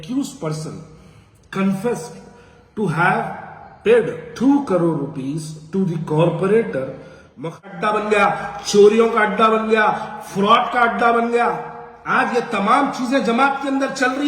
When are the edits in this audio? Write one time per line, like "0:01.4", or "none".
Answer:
0:07.6